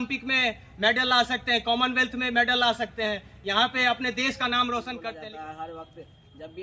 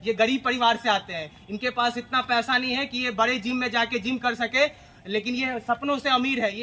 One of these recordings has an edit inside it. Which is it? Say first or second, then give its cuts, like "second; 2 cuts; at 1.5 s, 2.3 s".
first; 1 cut; at 4.9 s